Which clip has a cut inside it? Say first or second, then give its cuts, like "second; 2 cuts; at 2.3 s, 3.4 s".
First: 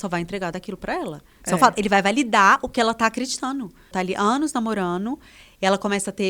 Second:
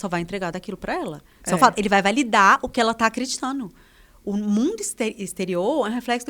first; 1 cut; at 3.9 s